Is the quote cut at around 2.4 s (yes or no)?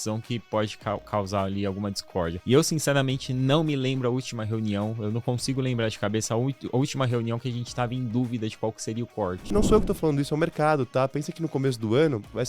yes